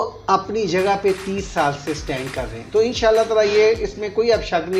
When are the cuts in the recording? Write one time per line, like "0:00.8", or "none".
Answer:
0:02.5